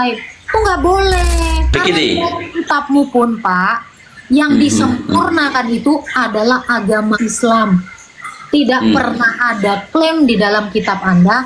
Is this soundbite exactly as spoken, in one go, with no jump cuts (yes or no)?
no